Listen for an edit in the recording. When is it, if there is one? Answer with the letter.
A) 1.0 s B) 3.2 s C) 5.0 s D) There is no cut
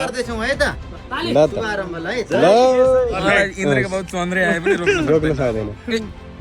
B